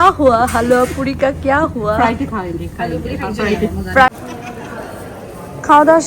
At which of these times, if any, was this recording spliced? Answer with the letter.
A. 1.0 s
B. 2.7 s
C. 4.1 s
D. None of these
C